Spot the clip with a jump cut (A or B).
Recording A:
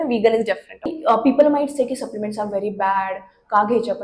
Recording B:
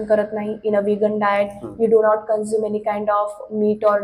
A